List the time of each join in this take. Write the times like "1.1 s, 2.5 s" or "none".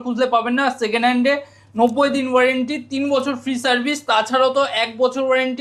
none

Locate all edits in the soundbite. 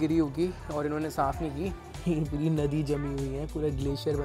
1.9 s

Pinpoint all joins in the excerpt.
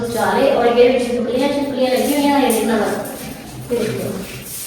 none

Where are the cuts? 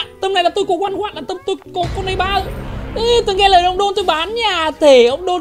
none

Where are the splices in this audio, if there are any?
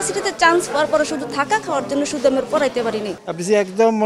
3.1 s

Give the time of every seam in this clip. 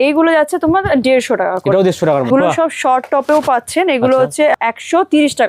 2.3 s, 4.5 s

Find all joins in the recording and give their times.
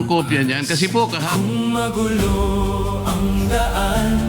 1.2 s

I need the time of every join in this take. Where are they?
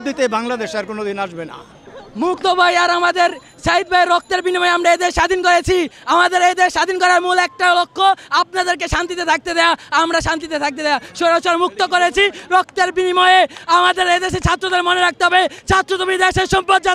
none

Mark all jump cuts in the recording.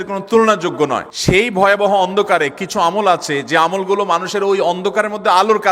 1.1 s

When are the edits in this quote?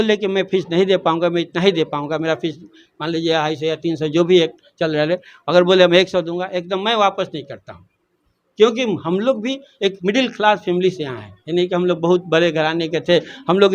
none

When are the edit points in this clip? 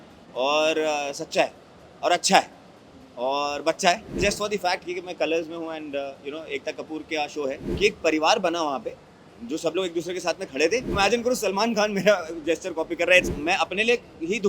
4.2 s, 7.6 s, 10.9 s, 13.3 s

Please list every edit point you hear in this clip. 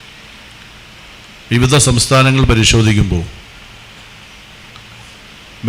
none

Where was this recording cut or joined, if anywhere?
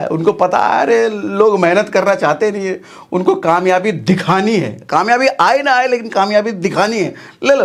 none

